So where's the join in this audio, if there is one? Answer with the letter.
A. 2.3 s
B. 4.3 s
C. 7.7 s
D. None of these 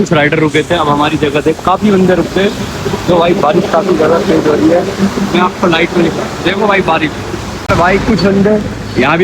C